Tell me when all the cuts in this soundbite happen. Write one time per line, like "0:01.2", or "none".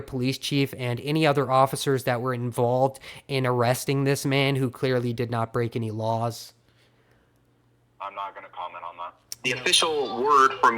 0:09.3

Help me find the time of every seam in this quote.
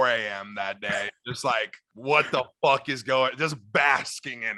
0:01.8

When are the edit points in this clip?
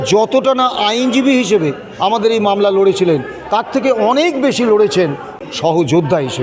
0:05.3

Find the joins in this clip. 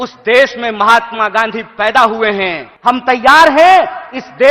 0:02.6

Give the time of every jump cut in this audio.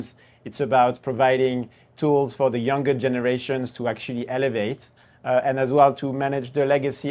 none

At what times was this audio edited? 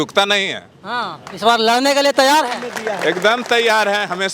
none

